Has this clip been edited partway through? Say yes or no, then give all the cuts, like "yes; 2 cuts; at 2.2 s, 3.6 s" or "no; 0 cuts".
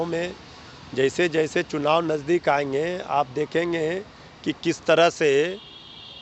no; 0 cuts